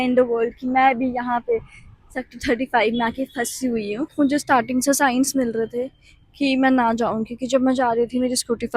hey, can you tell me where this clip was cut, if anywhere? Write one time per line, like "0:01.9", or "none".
0:04.1

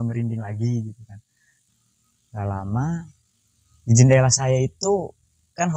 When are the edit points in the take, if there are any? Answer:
0:01.5

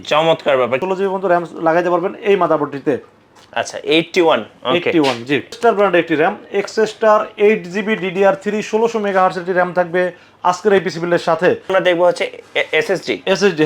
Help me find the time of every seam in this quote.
0:00.8
0:05.6
0:11.7

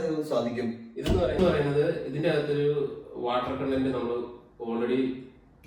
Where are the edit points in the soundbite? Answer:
none

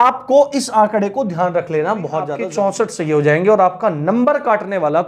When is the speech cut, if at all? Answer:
0:02.4

